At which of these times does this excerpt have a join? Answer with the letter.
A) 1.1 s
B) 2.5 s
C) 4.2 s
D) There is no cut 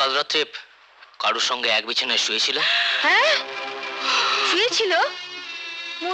D